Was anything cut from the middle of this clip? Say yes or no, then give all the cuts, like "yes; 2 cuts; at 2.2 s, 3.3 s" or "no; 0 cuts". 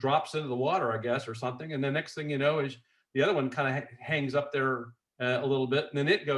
no; 0 cuts